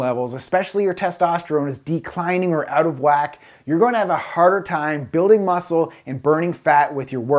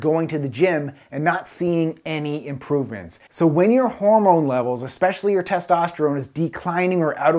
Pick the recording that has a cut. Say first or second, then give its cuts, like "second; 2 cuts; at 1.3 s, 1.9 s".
second; 1 cut; at 3.2 s